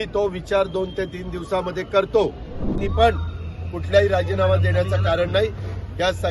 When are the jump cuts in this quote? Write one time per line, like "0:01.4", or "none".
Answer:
0:02.8